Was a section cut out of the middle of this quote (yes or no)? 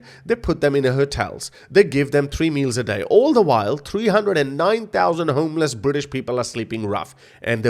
no